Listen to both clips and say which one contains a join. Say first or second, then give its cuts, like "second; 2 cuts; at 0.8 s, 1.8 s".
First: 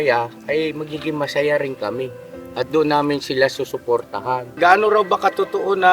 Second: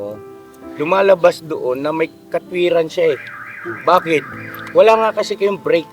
first; 1 cut; at 4.6 s